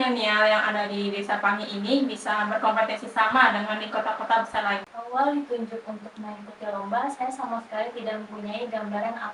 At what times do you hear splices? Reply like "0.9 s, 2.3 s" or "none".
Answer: 5.1 s